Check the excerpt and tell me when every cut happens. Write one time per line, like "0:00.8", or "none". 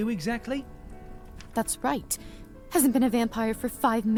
none